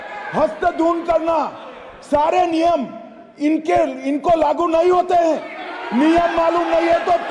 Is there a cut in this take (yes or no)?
no